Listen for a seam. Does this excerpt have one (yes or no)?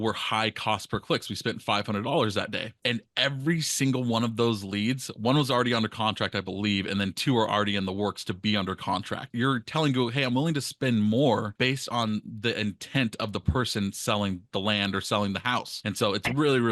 yes